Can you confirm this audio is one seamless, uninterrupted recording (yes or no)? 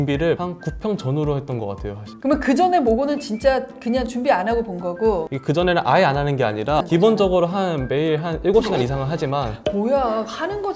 no